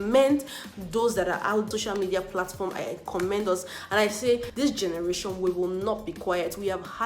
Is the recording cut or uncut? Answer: cut